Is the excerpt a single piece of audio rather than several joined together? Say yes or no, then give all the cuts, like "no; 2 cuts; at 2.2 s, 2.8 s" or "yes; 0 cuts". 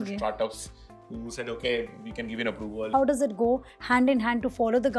no; 1 cut; at 2.9 s